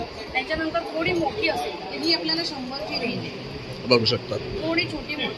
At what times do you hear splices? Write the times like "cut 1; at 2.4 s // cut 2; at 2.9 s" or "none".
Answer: none